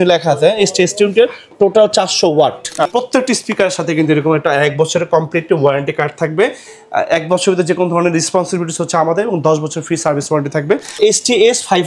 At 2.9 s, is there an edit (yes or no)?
yes